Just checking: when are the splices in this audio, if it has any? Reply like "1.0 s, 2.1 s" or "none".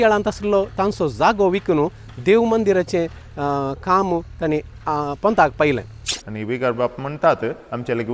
6.1 s